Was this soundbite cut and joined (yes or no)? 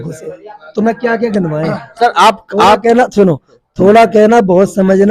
no